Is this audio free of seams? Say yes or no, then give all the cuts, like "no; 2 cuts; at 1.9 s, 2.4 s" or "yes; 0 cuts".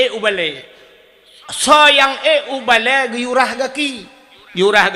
yes; 0 cuts